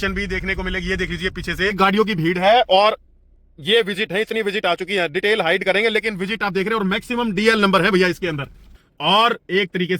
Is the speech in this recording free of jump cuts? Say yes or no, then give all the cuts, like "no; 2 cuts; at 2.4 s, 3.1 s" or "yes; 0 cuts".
no; 2 cuts; at 1.7 s, 8.8 s